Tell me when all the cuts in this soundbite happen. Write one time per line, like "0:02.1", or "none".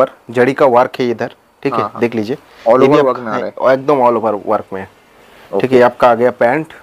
none